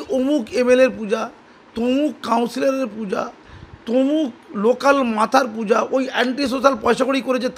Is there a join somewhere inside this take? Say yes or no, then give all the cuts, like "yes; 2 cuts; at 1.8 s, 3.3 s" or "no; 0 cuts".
no; 0 cuts